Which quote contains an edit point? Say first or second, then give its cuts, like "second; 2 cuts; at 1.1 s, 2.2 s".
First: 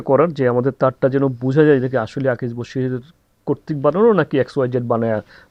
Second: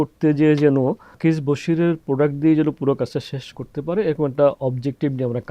second; 1 cut; at 1.1 s